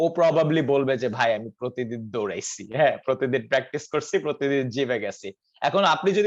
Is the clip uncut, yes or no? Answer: yes